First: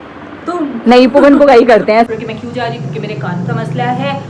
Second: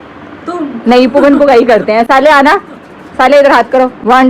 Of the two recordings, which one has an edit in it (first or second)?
first